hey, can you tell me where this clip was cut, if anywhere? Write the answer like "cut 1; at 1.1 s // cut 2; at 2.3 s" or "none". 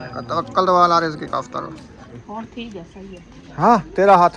cut 1; at 2.2 s